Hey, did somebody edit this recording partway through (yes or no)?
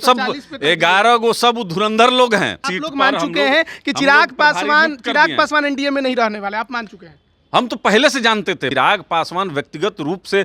yes